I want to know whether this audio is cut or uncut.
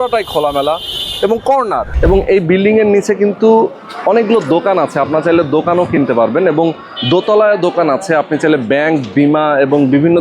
cut